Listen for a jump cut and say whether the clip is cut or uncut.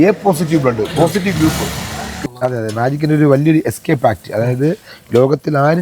cut